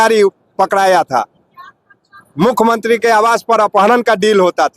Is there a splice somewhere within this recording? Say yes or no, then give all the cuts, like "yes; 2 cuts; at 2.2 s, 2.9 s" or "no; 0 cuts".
no; 0 cuts